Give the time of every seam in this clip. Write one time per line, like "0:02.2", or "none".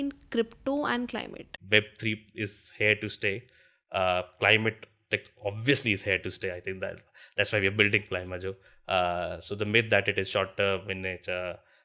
0:01.5